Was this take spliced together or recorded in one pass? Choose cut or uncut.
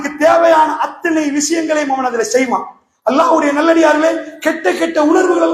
uncut